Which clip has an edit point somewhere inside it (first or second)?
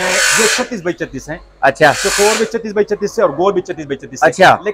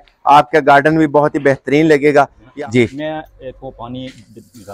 second